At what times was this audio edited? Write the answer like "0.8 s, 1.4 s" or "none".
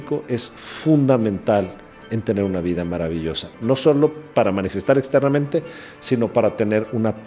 3.5 s